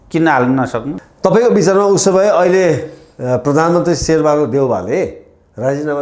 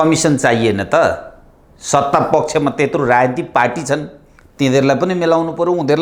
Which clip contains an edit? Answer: first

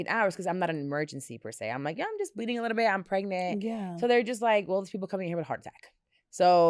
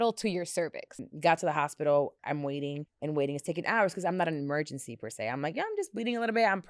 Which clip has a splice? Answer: second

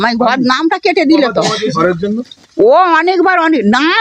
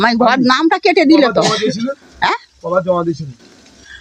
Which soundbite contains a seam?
first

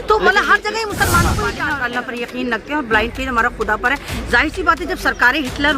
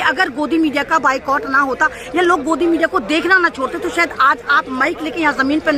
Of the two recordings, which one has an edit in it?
first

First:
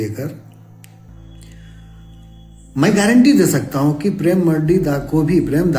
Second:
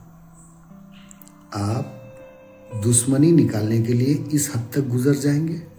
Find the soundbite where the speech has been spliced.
first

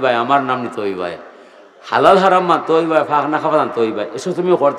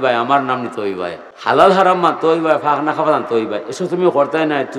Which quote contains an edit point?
second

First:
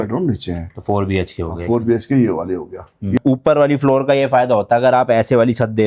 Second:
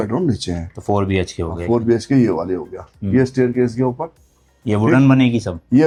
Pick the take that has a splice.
first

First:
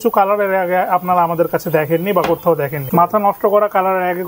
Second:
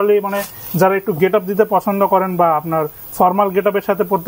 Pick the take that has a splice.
first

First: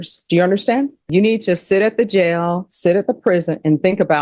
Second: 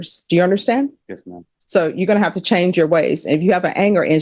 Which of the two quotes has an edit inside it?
first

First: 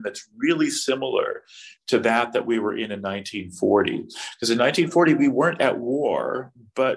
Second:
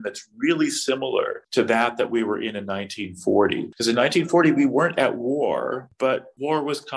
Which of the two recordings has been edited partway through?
second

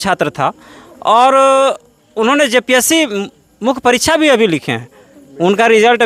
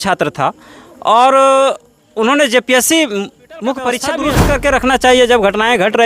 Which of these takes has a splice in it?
second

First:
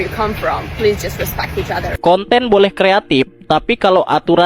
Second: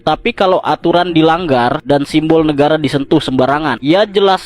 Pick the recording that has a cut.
first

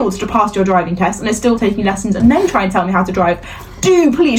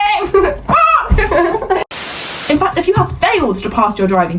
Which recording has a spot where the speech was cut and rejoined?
second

